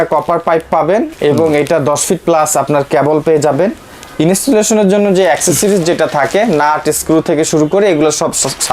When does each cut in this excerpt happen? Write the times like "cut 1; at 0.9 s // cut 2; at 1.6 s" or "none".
none